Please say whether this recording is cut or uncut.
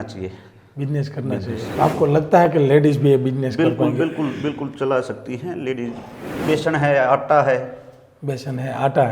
cut